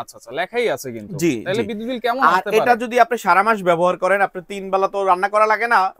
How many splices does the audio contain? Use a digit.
0